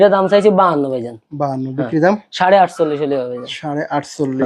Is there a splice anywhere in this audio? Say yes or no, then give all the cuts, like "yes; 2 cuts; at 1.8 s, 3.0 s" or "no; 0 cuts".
no; 0 cuts